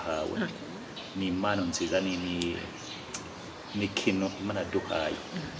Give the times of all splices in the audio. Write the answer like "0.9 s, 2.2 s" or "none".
1.0 s

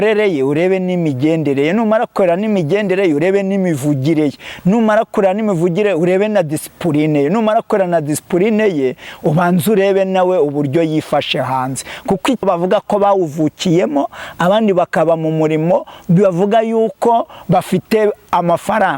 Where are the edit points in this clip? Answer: 12.4 s

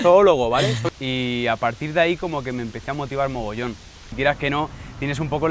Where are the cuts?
0.8 s, 4.1 s

